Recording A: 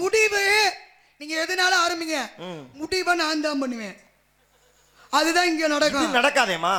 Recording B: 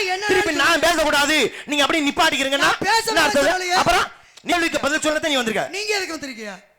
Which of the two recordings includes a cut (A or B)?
B